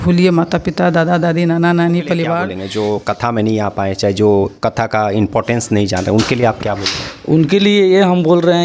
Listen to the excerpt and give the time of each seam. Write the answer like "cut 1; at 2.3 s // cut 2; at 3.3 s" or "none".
cut 1; at 2.4 s